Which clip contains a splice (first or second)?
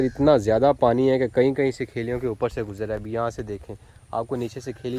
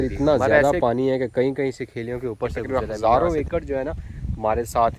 second